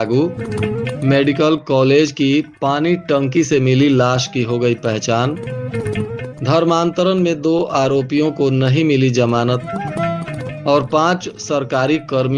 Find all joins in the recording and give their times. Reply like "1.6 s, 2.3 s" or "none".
none